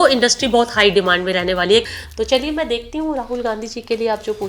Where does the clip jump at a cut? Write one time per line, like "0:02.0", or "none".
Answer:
0:01.8